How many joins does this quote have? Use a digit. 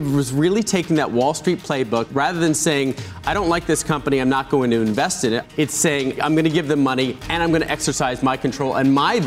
2